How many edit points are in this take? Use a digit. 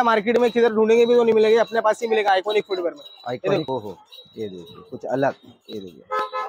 1